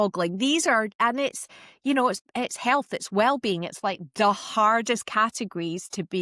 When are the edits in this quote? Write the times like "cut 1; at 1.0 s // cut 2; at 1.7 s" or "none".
cut 1; at 0.9 s